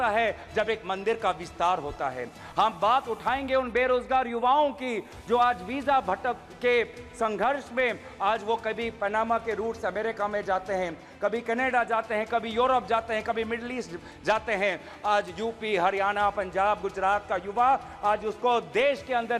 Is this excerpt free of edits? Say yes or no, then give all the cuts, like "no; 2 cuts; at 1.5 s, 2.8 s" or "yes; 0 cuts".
yes; 0 cuts